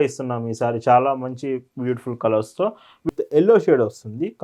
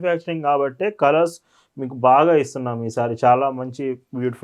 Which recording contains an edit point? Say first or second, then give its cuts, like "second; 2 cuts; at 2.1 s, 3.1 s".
first; 1 cut; at 3.1 s